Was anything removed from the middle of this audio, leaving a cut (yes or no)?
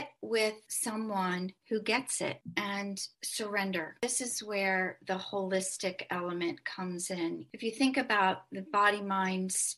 yes